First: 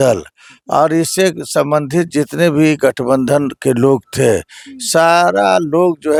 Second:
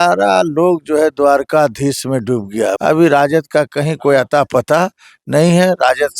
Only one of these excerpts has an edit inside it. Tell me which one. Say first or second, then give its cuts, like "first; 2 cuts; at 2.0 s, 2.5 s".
second; 1 cut; at 2.8 s